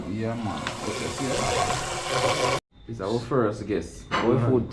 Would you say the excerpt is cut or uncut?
cut